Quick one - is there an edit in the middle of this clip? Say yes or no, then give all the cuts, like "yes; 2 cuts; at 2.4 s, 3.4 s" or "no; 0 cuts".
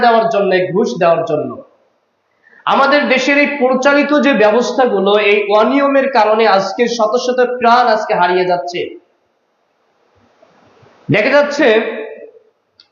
no; 0 cuts